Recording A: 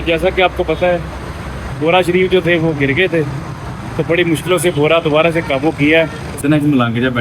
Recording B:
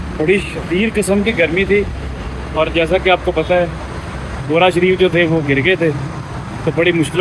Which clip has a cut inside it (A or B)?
A